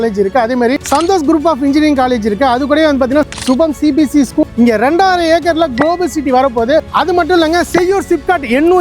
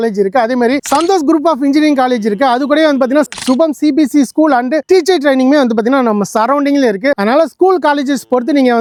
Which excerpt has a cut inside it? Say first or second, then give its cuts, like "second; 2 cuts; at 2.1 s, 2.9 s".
first; 2 cuts; at 4.4 s, 6.8 s